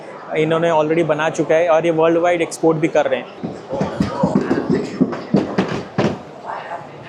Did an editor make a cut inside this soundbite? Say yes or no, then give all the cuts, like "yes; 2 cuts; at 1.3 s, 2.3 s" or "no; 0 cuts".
yes; 1 cut; at 3.4 s